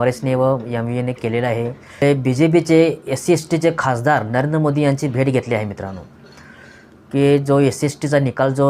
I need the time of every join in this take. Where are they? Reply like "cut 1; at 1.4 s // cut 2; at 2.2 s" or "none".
cut 1; at 2.0 s